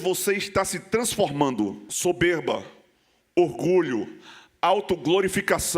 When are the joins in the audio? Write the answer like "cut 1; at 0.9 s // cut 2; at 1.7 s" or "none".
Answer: cut 1; at 1.9 s